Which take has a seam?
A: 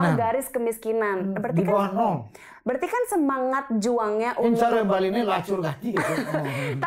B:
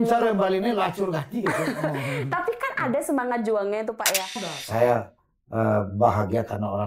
B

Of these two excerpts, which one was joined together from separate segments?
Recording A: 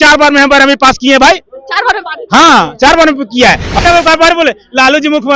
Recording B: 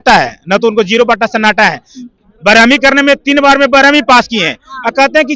A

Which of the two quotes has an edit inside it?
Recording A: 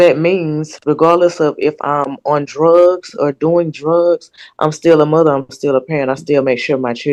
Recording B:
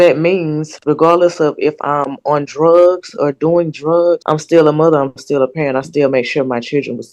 B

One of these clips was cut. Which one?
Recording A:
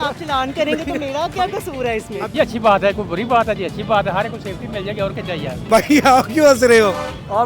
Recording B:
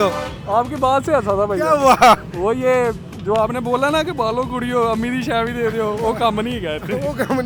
A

